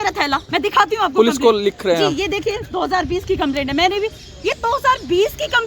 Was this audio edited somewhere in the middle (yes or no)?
no